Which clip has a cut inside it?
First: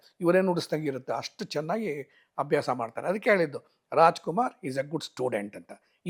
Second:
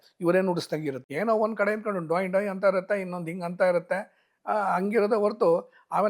second; 1 cut; at 1.0 s

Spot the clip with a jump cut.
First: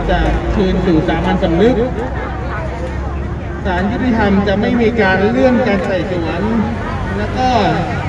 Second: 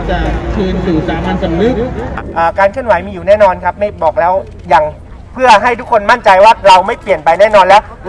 second; 1 cut; at 2.1 s

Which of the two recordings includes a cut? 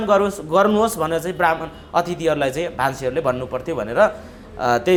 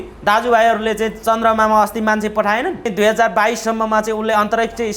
second; 1 cut; at 2.9 s

